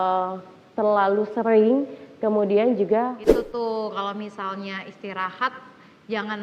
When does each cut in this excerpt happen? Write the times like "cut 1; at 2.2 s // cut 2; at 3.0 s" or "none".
cut 1; at 3.2 s